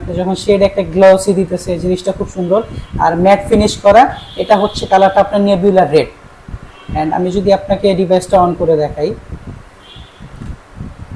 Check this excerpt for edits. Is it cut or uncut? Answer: uncut